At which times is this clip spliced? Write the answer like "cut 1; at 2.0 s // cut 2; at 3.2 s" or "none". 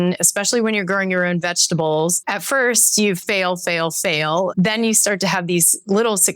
cut 1; at 4.5 s